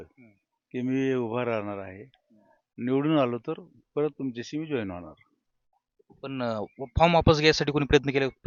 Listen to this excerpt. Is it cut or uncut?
uncut